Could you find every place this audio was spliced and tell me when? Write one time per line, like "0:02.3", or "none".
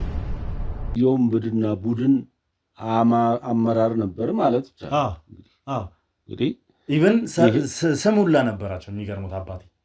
0:00.9